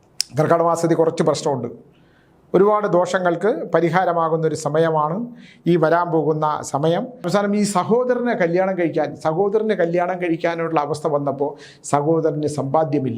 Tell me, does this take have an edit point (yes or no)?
yes